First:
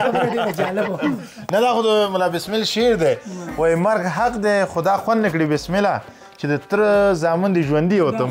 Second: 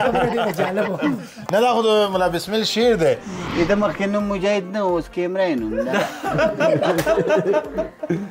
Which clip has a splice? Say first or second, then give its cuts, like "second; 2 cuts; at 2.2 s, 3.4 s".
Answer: second; 1 cut; at 3.4 s